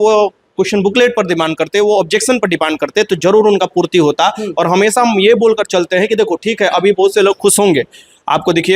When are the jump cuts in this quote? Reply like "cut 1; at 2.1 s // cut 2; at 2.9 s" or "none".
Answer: none